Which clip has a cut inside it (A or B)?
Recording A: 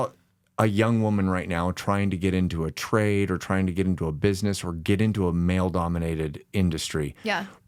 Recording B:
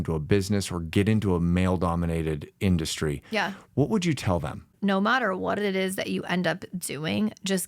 B